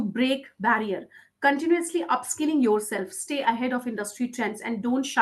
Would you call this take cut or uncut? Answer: uncut